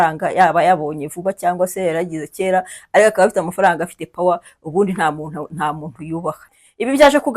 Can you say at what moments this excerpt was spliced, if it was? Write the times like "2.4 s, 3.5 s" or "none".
6.5 s